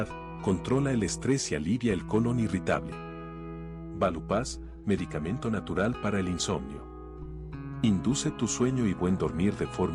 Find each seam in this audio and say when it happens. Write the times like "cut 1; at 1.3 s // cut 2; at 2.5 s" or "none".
cut 1; at 5.4 s